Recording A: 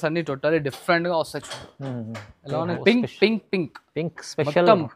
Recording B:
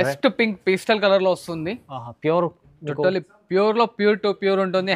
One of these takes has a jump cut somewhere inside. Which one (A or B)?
A